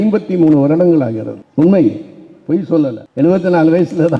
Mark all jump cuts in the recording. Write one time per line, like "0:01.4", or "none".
0:03.0